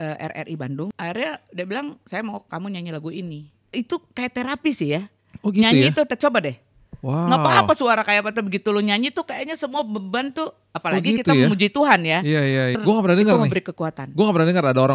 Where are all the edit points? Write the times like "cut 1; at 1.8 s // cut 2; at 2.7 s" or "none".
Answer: cut 1; at 0.9 s // cut 2; at 3.5 s // cut 3; at 12.8 s